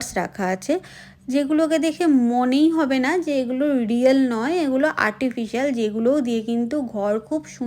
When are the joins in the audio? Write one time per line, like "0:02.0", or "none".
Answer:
none